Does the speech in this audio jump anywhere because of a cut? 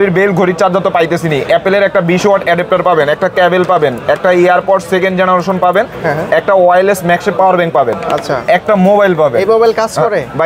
no; 0 cuts

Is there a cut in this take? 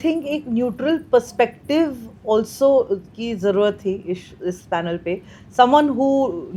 no; 0 cuts

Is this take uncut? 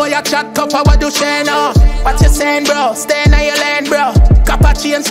yes; 0 cuts

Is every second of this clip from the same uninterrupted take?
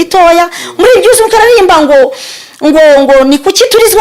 yes; 0 cuts

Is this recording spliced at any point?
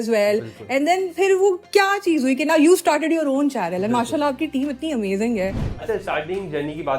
yes; 1 cut; at 5.6 s

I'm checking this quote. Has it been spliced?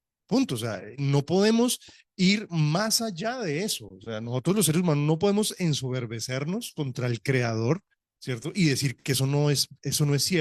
no; 0 cuts

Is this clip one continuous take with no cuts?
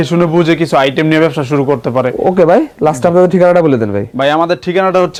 yes; 0 cuts

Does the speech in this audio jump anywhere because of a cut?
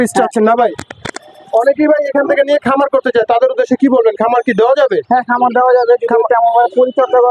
no; 0 cuts

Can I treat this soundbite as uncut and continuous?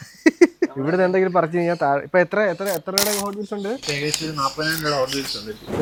yes; 0 cuts

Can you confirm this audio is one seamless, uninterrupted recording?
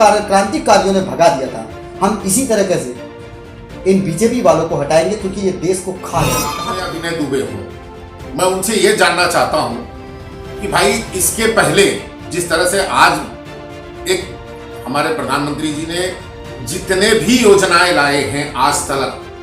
no; 1 cut; at 6.6 s

